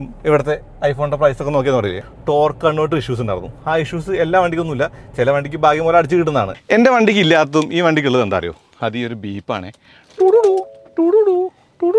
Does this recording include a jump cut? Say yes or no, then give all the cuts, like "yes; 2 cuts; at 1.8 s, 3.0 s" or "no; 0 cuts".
yes; 2 cuts; at 2.0 s, 6.6 s